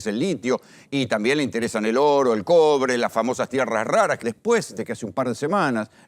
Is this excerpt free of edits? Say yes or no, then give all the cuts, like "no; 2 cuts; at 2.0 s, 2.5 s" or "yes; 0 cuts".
no; 1 cut; at 4.2 s